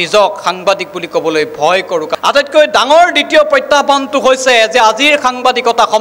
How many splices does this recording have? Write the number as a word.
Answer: one